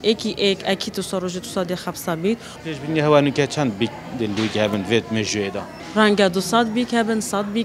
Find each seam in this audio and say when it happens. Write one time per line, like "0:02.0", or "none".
0:02.5
0:05.7